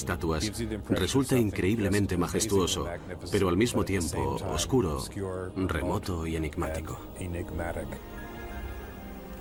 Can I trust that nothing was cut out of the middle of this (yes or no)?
yes